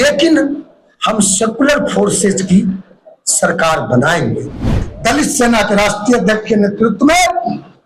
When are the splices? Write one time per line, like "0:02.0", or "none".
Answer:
0:04.8